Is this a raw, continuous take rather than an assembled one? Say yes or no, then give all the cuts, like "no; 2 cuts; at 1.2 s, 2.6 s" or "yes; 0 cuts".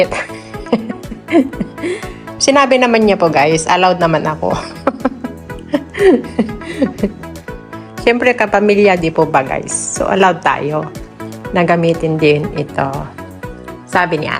yes; 0 cuts